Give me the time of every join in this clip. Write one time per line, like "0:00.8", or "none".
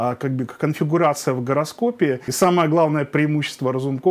0:02.3